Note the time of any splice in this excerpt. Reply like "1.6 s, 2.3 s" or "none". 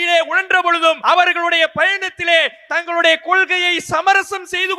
1.0 s

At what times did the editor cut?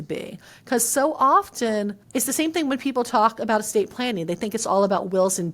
2.0 s

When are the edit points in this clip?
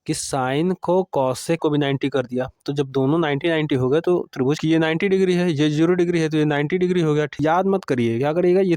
1.6 s, 4.6 s, 7.3 s

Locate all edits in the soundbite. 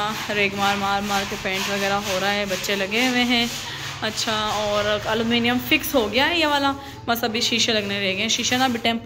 none

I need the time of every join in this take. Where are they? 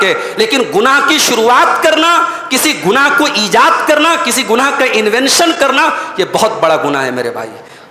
none

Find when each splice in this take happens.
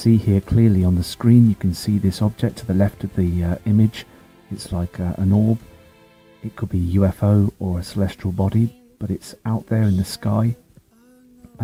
none

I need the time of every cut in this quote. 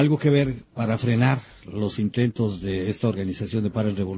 3.1 s

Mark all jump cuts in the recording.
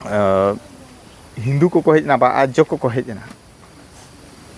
none

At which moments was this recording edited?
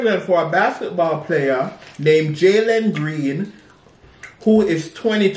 none

